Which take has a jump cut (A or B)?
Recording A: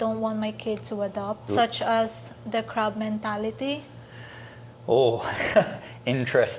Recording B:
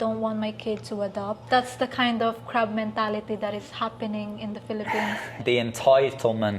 B